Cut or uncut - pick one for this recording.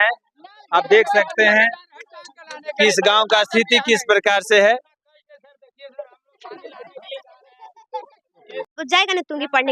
cut